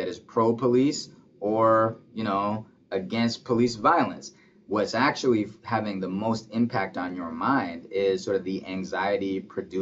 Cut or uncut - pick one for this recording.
uncut